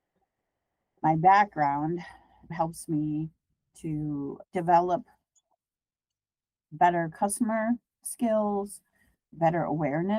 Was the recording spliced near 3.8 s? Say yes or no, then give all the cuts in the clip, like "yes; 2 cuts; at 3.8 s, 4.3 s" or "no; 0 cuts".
no; 1 cut; at 2.5 s